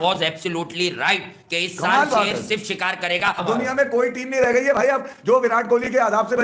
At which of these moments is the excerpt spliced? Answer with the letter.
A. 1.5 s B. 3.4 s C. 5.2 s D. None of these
B